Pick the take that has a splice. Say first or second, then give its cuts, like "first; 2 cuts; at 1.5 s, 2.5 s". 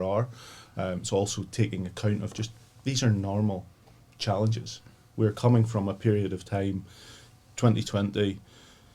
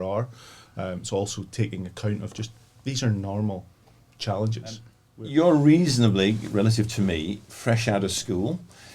second; 1 cut; at 5.0 s